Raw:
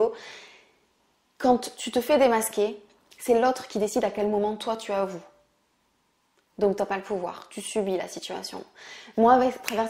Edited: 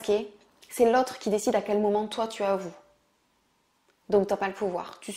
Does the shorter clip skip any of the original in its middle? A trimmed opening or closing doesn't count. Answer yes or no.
no